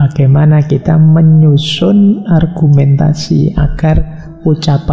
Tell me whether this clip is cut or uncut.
uncut